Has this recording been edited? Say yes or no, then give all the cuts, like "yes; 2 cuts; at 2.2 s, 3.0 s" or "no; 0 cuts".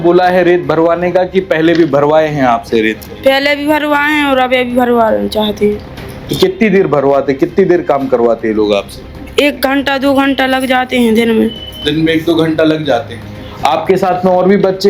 no; 0 cuts